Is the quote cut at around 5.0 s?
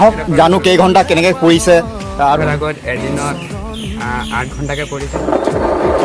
no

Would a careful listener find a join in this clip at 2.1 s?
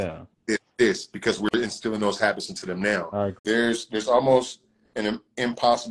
no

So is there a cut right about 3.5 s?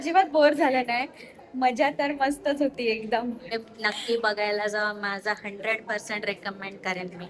yes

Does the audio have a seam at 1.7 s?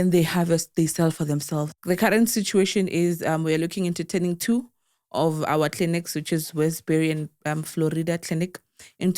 yes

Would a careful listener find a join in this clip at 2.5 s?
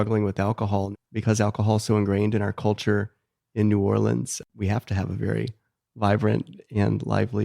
no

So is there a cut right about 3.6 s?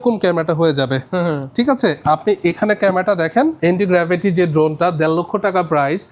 yes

